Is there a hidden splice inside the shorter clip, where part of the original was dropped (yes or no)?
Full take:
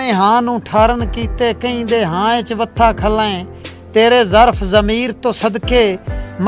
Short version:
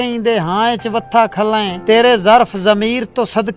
yes